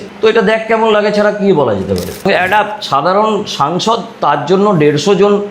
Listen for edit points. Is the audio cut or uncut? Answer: cut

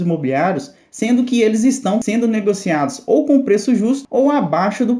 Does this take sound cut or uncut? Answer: cut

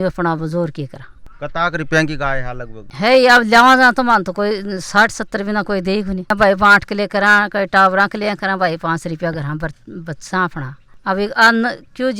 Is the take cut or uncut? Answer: uncut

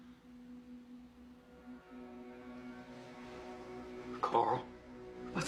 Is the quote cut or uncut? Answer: uncut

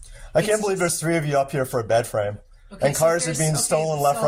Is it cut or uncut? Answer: uncut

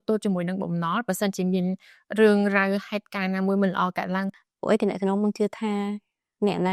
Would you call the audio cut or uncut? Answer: cut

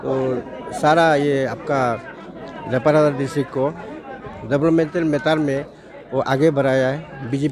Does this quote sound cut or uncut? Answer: uncut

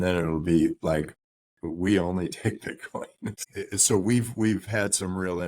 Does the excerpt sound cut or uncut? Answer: cut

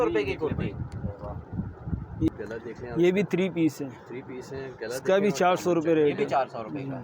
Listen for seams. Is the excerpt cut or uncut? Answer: cut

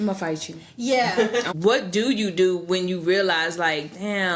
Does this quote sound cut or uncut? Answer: cut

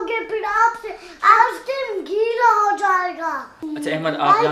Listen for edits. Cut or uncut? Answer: cut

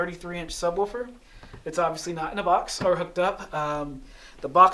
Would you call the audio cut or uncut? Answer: uncut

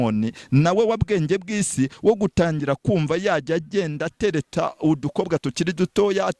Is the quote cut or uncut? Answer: uncut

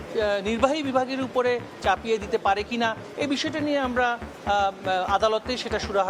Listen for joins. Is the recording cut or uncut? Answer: uncut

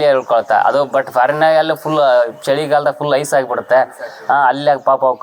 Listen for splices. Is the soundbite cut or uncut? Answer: uncut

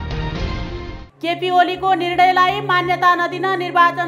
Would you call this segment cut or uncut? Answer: uncut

